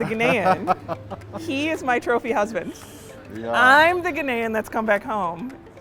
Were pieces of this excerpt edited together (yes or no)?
no